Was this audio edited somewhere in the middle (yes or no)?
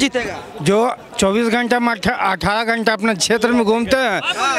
no